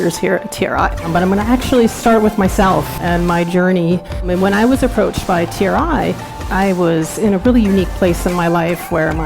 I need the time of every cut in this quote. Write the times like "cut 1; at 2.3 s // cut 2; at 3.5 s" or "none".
cut 1; at 1.0 s // cut 2; at 3.0 s // cut 3; at 4.3 s // cut 4; at 6.4 s